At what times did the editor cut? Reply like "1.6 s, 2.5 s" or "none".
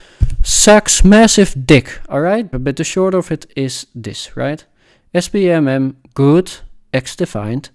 2.5 s